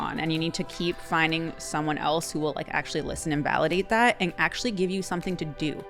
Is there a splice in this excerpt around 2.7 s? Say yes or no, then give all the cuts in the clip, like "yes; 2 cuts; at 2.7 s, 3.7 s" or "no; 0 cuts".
no; 0 cuts